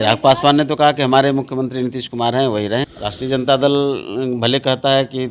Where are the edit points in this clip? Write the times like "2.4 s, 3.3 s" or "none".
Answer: 2.8 s